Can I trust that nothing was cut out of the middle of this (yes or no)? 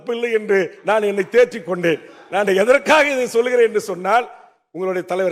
yes